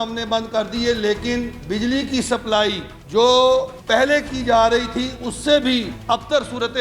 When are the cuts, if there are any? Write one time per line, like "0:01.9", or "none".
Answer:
0:02.9
0:03.8
0:05.9